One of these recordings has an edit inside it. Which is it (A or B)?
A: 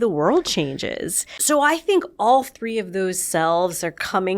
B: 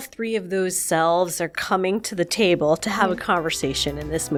A